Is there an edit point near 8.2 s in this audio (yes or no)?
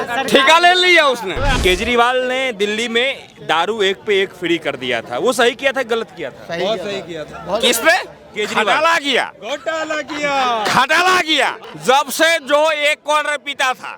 no